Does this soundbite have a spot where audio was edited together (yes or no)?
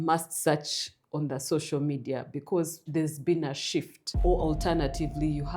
yes